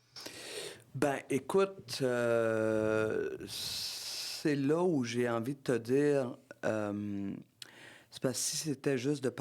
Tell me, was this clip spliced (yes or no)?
no